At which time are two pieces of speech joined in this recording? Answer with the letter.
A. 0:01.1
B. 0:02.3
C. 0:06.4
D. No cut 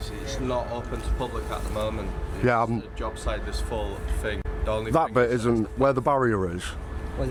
D